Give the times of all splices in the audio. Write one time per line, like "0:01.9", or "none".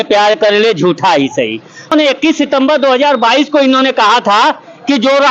0:01.9